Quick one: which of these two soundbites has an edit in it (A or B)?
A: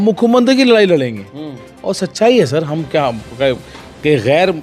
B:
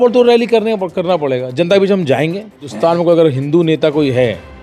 B